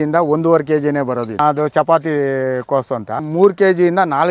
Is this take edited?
yes; 2 cuts; at 1.4 s, 3.2 s

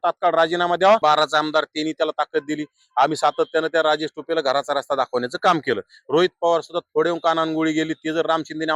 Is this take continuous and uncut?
no; 1 cut; at 1.0 s

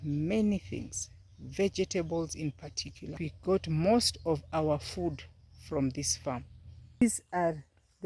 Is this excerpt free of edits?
no; 2 cuts; at 3.1 s, 7.0 s

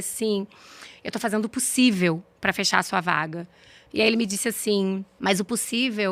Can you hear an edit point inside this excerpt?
yes; 1 cut; at 5.1 s

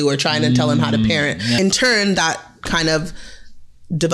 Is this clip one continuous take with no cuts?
no; 1 cut; at 1.6 s

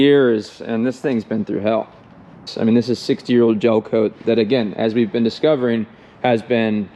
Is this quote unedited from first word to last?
no; 1 cut; at 2.5 s

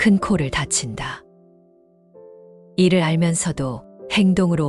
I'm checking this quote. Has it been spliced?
yes; 2 cuts; at 1.3 s, 2.7 s

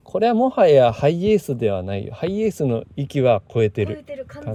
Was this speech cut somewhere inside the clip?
no; 0 cuts

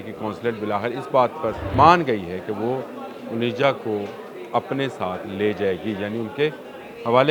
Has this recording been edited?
yes; 1 cut; at 1.6 s

